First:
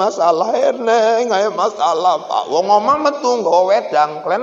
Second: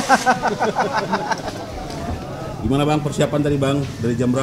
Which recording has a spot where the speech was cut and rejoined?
second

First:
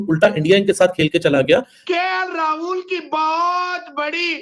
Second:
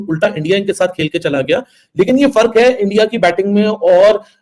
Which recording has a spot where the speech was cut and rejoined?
first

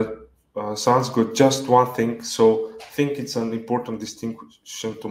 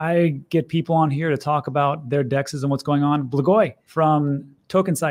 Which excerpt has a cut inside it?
second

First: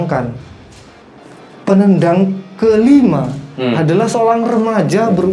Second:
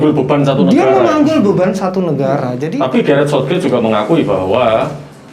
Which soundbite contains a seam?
second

